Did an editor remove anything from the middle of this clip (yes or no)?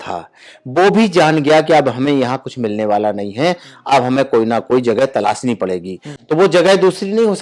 no